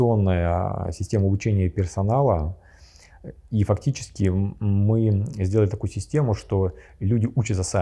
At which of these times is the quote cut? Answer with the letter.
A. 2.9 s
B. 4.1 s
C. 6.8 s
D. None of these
D